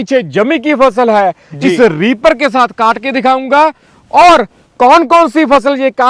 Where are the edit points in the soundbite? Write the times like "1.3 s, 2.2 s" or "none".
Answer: none